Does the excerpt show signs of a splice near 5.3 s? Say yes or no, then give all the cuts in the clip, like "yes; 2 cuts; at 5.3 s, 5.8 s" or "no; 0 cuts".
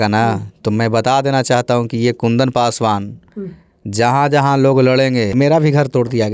yes; 1 cut; at 5.3 s